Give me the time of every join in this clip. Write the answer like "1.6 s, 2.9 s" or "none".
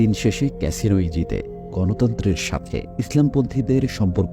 1.7 s